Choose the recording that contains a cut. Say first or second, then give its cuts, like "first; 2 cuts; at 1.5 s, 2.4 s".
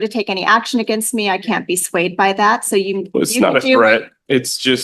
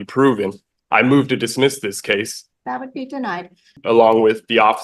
second; 2 cuts; at 2.4 s, 3.8 s